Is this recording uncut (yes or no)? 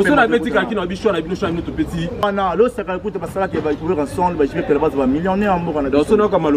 no